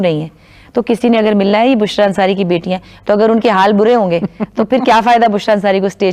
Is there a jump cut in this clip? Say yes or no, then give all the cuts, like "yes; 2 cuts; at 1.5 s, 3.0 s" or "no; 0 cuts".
no; 0 cuts